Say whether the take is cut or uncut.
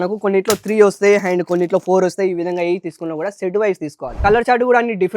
cut